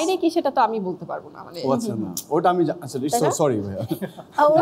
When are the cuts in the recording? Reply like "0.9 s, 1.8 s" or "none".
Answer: none